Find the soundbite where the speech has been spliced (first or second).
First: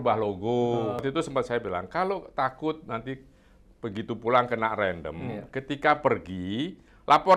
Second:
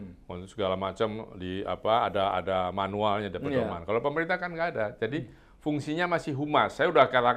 first